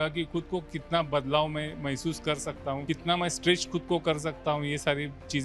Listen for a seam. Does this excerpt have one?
no; 0 cuts

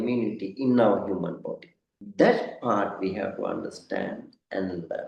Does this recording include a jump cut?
no; 0 cuts

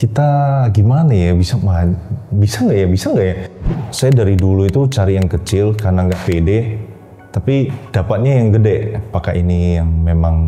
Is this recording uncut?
no; 3 cuts; at 3.6 s, 7.8 s, 9.1 s

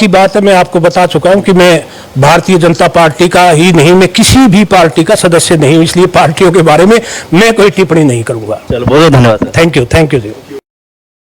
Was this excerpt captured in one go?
yes; 0 cuts

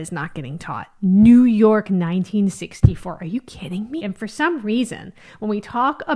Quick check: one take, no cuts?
no; 1 cut; at 4.0 s

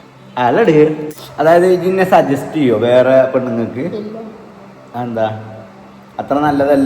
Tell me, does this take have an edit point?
yes; 1 cut; at 1.0 s

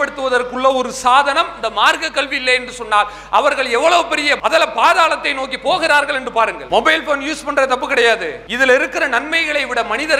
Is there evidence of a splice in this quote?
no; 0 cuts

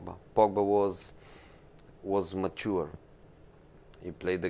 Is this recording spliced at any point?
no; 0 cuts

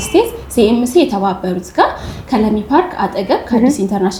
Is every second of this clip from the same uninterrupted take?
yes; 0 cuts

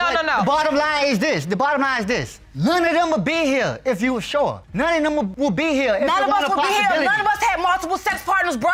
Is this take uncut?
yes; 0 cuts

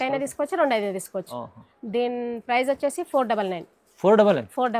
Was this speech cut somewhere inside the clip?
no; 0 cuts

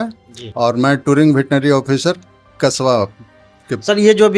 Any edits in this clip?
no; 0 cuts

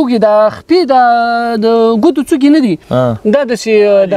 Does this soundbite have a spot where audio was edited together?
no; 0 cuts

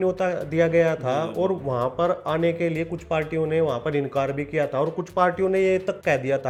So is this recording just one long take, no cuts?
yes; 0 cuts

